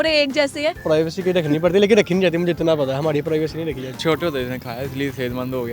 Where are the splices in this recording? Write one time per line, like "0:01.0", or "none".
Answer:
0:00.8
0:03.9